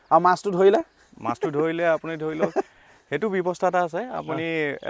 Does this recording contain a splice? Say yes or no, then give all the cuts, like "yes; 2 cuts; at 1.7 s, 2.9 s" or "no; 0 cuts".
no; 0 cuts